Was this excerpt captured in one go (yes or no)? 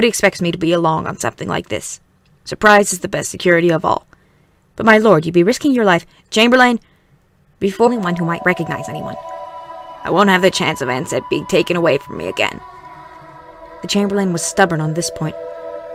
yes